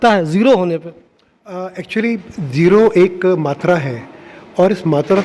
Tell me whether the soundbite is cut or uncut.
uncut